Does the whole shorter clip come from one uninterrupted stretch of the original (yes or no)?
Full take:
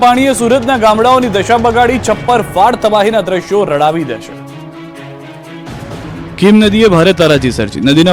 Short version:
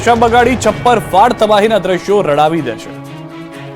yes